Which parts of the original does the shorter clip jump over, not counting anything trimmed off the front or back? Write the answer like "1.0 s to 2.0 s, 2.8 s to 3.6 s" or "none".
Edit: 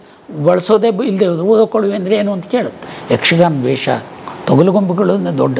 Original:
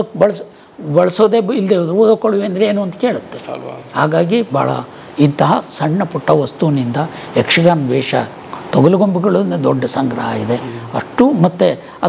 3.4 s to 7.2 s